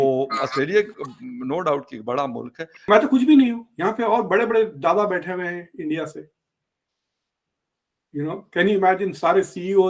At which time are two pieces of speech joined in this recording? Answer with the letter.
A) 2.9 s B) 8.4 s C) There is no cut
A